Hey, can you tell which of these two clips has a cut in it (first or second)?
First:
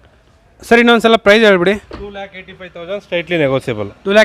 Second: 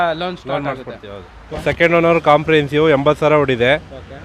second